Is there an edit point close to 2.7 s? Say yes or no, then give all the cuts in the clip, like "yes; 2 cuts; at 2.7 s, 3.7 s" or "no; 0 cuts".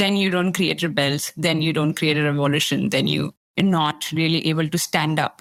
no; 0 cuts